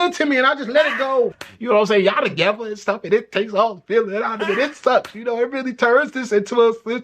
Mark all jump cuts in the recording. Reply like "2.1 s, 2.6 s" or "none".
1.5 s